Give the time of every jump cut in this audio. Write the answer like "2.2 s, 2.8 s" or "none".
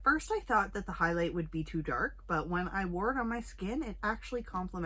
none